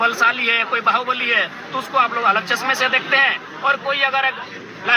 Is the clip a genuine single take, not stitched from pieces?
yes; 0 cuts

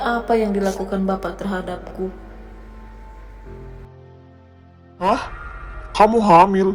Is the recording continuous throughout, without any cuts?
no; 1 cut; at 5.0 s

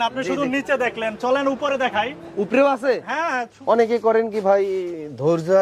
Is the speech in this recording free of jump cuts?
no; 1 cut; at 3.8 s

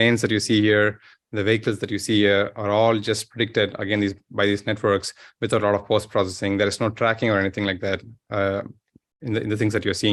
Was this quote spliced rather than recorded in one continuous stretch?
no; 0 cuts

